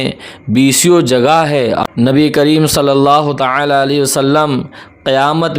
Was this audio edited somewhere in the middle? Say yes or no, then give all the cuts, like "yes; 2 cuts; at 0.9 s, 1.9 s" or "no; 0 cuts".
yes; 1 cut; at 1.8 s